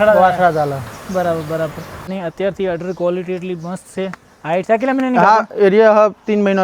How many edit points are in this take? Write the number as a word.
one